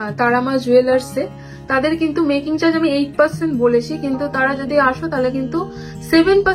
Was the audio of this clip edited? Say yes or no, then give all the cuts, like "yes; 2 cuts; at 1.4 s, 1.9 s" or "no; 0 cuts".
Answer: no; 0 cuts